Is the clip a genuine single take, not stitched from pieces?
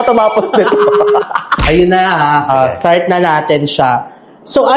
yes; 0 cuts

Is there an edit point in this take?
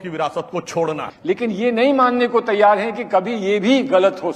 yes; 1 cut; at 1.1 s

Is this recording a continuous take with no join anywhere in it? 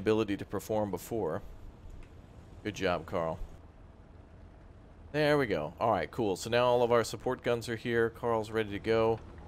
no; 1 cut; at 3.6 s

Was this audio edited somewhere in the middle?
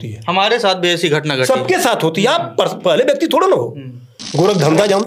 yes; 1 cut; at 4.2 s

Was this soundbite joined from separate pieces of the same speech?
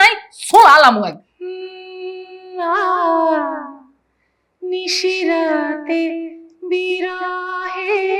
yes; 1 cut; at 1.2 s

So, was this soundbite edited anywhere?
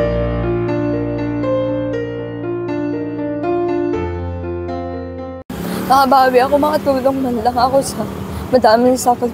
yes; 1 cut; at 5.4 s

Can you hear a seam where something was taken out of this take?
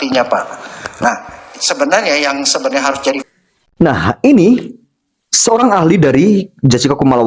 no; 0 cuts

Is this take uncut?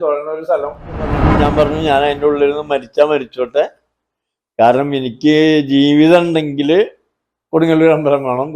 no; 1 cut; at 1.2 s

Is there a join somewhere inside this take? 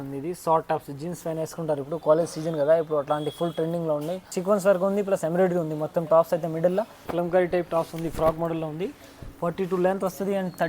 yes; 2 cuts; at 4.3 s, 7.1 s

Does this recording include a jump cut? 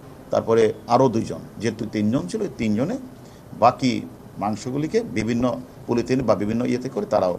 no; 0 cuts

